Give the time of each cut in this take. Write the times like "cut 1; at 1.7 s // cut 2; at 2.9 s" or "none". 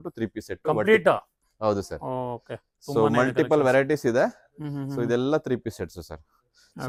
none